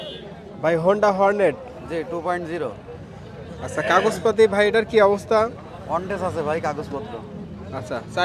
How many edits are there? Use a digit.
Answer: 0